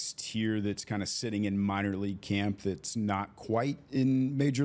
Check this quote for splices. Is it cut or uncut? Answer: uncut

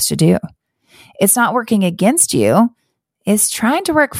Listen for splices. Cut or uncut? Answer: uncut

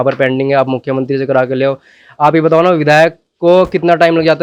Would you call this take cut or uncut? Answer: uncut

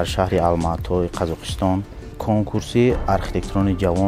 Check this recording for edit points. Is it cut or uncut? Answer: uncut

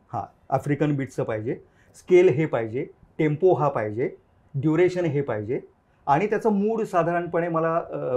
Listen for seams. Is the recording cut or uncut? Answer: uncut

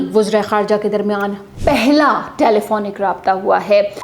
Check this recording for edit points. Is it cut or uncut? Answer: uncut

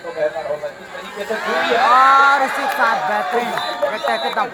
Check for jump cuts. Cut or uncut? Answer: uncut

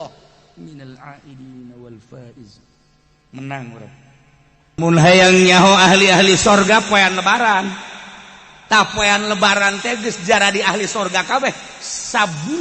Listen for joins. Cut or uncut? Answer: cut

